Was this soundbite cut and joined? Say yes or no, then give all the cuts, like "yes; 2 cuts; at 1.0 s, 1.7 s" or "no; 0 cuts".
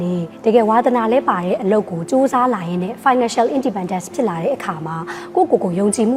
no; 0 cuts